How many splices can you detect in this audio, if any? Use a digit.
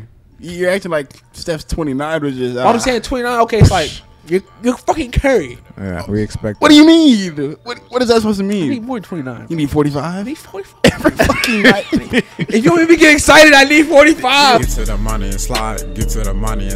1